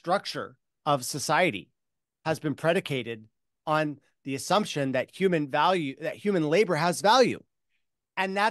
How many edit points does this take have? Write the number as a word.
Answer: zero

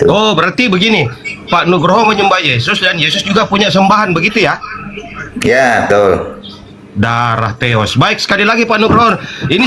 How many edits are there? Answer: zero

